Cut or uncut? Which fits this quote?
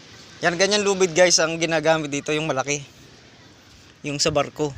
uncut